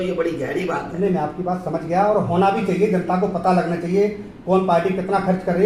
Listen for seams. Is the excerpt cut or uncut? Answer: uncut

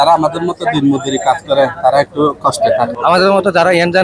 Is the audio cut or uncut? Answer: cut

